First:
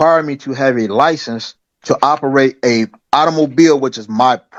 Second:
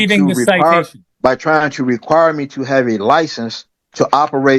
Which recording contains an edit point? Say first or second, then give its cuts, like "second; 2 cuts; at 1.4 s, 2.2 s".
second; 1 cut; at 1.0 s